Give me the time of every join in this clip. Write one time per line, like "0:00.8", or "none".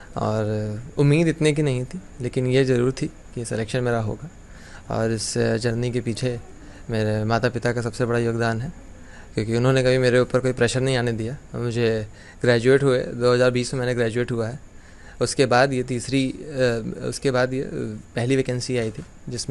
none